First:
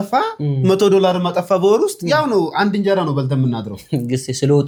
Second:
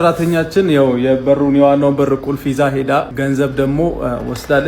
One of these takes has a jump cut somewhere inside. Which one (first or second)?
second